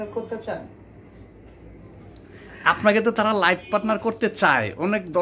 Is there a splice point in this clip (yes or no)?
no